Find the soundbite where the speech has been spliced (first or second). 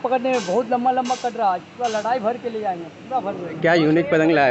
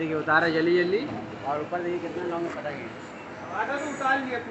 first